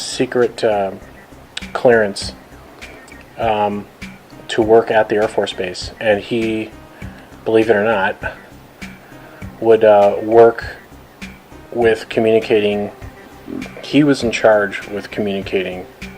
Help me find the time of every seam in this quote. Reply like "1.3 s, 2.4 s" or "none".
11.0 s